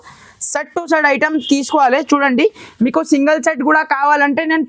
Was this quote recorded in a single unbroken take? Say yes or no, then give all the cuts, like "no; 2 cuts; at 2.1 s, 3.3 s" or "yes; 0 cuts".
yes; 0 cuts